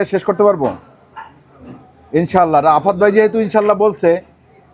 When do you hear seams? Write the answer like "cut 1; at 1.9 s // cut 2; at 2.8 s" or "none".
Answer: none